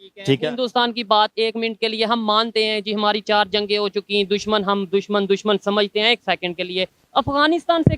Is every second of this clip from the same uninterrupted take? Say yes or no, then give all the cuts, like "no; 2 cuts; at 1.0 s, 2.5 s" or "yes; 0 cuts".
yes; 0 cuts